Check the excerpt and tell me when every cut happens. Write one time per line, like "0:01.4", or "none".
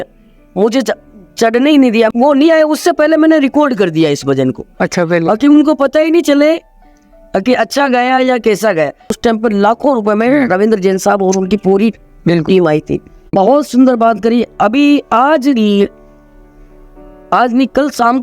0:02.1
0:09.2
0:13.3

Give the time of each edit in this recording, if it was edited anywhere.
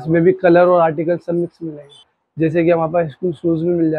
0:02.2

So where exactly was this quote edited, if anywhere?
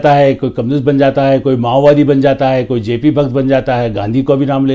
none

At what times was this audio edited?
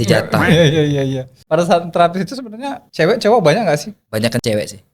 0:01.3
0:02.8
0:04.0

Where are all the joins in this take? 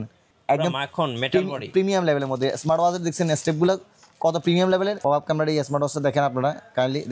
0:05.0

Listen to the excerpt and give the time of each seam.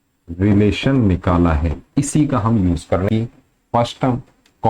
0:03.0

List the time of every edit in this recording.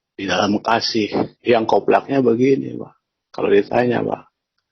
0:01.3

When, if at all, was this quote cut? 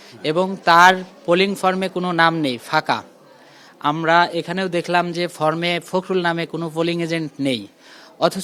none

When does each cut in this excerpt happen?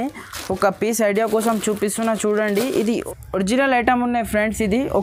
none

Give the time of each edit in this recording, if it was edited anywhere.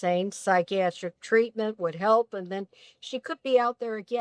none

